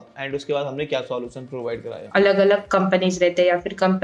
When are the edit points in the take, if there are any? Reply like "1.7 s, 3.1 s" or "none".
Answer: 2.1 s

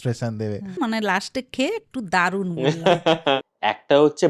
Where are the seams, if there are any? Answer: 0.8 s, 3.4 s

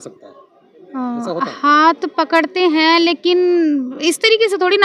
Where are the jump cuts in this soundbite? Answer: none

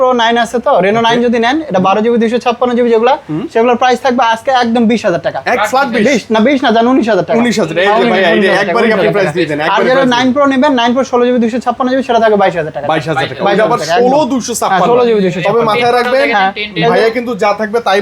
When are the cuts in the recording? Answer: none

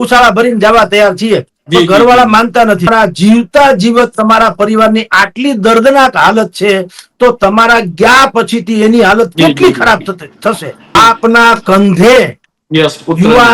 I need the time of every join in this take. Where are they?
2.9 s, 11.0 s

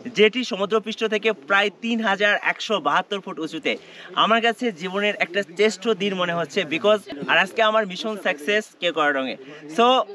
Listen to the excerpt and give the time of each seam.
none

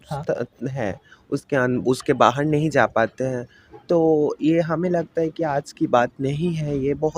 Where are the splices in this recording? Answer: none

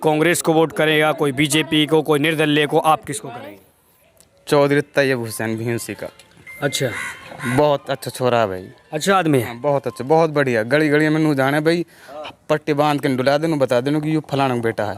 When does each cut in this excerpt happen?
none

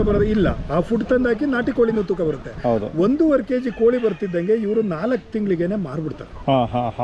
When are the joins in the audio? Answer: none

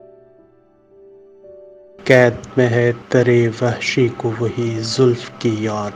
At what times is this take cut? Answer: 2.0 s

